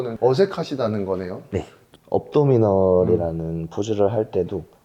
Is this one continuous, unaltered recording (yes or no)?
no